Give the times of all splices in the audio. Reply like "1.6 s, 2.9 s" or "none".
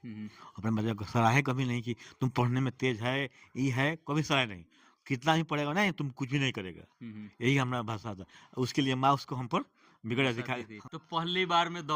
10.8 s